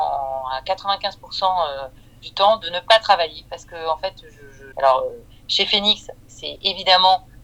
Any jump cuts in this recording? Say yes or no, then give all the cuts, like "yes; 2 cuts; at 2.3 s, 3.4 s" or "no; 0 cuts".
no; 0 cuts